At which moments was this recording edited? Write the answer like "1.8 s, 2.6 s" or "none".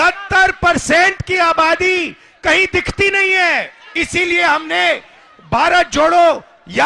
3.9 s